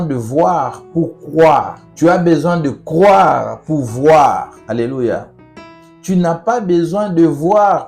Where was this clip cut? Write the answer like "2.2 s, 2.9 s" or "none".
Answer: 1.8 s, 4.5 s